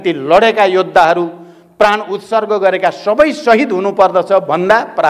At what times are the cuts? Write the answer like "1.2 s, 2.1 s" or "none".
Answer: none